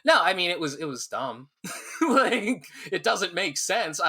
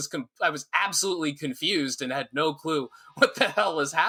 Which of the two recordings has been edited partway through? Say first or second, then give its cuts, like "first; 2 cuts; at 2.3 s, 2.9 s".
first; 1 cut; at 2.4 s